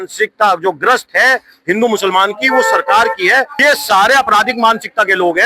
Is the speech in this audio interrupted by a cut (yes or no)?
yes